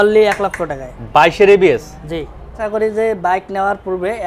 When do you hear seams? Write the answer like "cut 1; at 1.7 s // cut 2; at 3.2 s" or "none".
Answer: cut 1; at 2.6 s

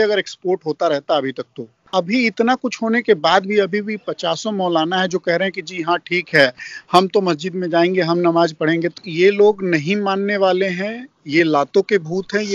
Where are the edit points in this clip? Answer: cut 1; at 1.8 s // cut 2; at 9.0 s

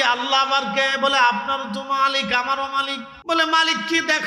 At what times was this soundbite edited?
cut 1; at 3.1 s

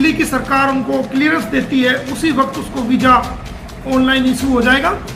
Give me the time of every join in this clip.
none

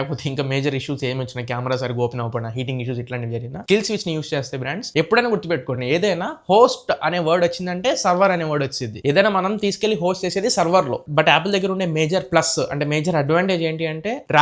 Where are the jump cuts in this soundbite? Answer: cut 1; at 4.8 s // cut 2; at 11.0 s

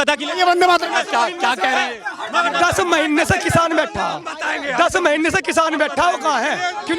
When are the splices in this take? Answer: none

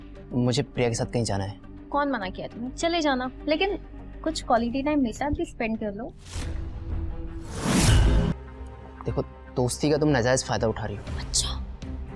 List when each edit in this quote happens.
cut 1; at 8.3 s

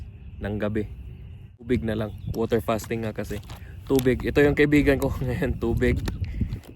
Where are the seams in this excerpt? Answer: cut 1; at 1.7 s

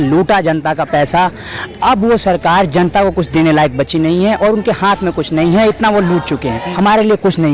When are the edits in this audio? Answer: cut 1; at 6.6 s

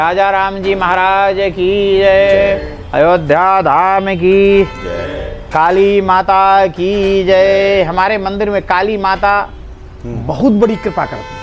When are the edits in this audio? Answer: none

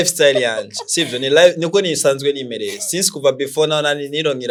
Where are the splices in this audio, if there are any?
none

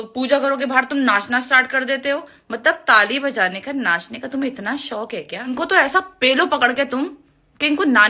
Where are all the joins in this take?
cut 1; at 5.5 s

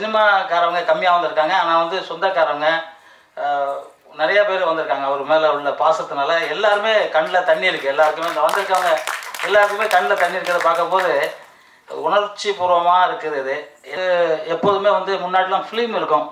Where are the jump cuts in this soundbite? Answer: cut 1; at 13.9 s

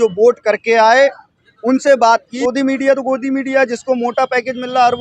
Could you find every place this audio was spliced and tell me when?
cut 1; at 2.3 s

